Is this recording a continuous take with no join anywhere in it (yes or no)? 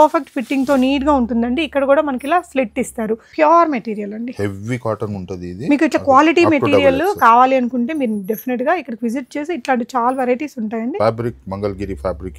no